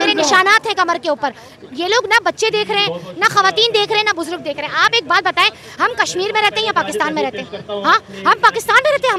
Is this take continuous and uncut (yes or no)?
yes